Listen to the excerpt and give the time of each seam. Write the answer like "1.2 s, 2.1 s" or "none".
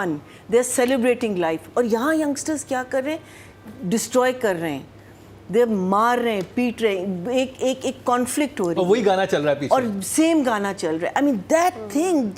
none